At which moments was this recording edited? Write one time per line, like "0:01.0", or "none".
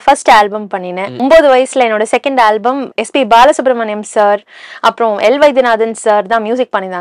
0:01.2
0:02.9